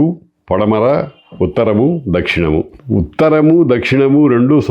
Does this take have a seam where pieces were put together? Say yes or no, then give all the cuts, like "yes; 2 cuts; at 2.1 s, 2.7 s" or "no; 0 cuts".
yes; 1 cut; at 2.8 s